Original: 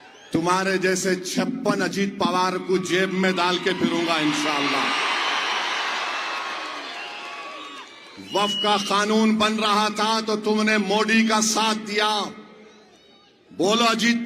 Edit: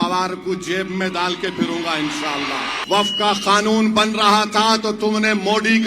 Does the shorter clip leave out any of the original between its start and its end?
yes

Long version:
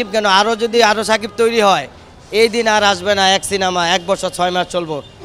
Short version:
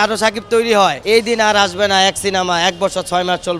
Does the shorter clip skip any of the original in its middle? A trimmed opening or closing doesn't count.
yes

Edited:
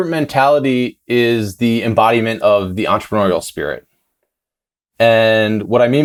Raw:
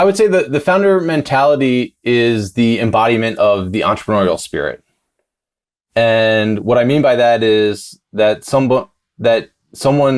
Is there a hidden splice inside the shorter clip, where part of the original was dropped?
no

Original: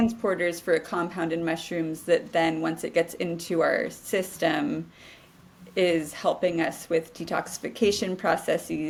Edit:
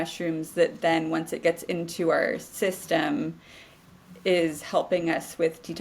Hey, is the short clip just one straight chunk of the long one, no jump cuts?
yes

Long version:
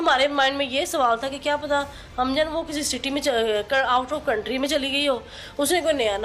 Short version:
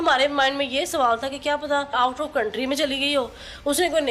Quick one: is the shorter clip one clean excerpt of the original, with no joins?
no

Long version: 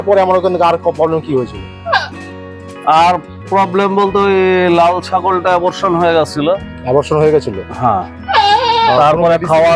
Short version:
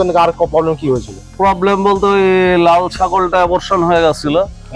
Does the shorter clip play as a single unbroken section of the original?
no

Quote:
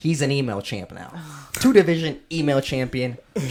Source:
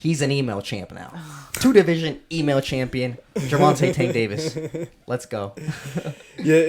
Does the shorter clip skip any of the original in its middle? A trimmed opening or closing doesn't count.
no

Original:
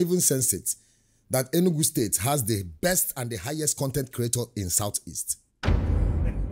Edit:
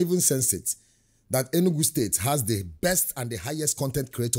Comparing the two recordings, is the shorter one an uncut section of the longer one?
yes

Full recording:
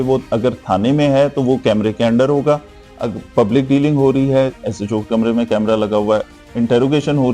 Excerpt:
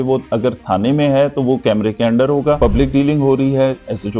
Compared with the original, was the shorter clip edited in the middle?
yes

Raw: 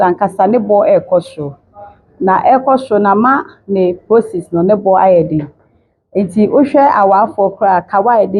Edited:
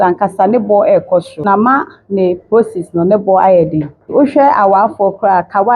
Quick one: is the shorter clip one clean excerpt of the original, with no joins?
no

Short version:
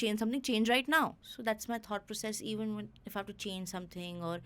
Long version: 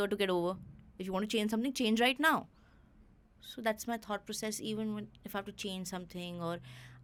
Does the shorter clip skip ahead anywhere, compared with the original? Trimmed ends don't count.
yes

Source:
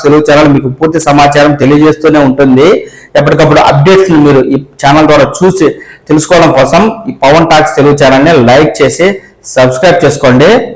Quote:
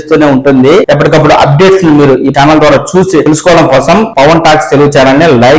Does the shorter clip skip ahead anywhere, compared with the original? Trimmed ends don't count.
yes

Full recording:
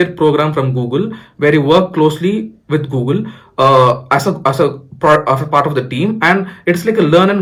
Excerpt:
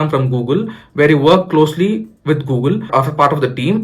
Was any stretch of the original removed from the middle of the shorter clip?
yes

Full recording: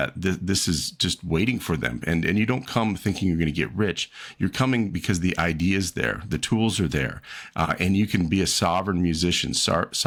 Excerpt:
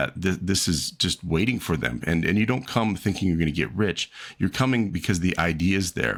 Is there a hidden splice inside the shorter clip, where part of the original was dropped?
no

